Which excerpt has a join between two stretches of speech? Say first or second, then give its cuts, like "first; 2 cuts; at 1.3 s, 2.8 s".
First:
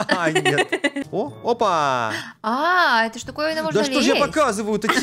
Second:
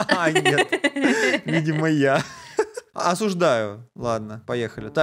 first; 1 cut; at 1.0 s